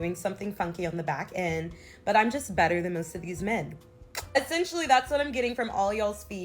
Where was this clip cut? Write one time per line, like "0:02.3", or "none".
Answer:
0:04.5